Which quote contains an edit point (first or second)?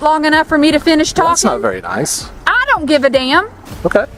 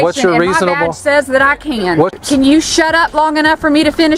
second